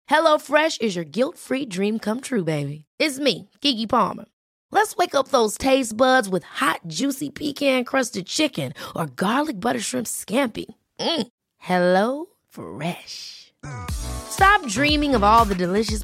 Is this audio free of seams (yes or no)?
yes